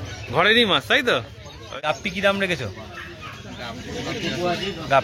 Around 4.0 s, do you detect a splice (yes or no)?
no